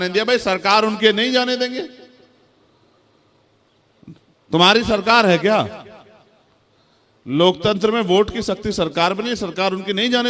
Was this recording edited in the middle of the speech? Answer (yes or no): no